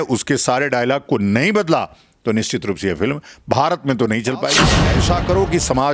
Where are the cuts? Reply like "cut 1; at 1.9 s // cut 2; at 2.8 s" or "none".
cut 1; at 4.8 s